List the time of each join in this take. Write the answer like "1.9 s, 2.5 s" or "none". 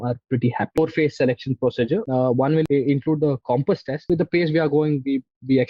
0.8 s, 2.5 s, 4.1 s